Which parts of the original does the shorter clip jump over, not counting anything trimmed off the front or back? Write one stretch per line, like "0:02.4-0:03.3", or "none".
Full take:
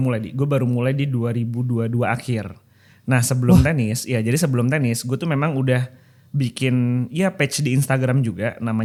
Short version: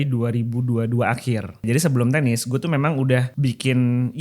0:02.7-0:04.2
0:05.9-0:06.3